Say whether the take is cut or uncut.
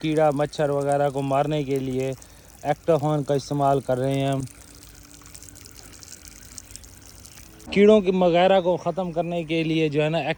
uncut